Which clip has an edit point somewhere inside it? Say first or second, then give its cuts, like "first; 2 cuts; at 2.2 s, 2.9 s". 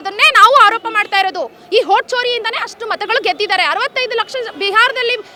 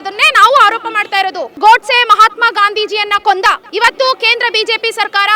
second; 2 cuts; at 1.6 s, 3.6 s